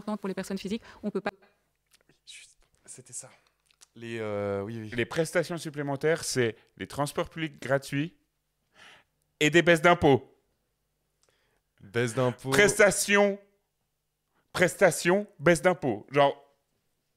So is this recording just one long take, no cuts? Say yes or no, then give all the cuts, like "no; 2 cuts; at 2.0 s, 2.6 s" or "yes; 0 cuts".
yes; 0 cuts